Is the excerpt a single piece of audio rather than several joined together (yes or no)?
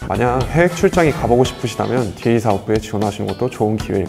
yes